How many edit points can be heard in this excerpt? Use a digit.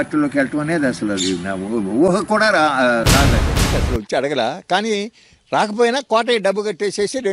1